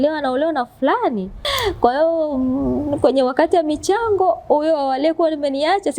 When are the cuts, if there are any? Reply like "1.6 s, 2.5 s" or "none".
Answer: 1.5 s